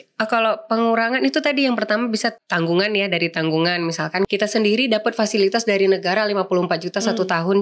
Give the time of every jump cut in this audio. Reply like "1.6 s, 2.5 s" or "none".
2.4 s, 4.3 s